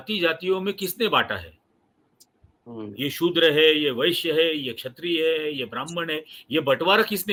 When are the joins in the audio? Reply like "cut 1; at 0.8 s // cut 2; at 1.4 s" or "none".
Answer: none